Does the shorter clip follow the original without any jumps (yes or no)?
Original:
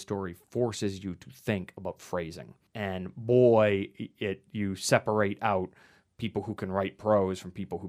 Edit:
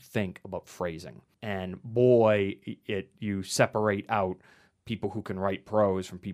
yes